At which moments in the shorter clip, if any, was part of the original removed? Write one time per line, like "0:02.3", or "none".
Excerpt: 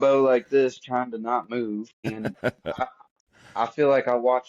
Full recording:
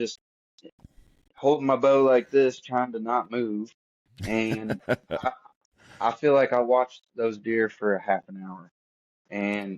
0:02.0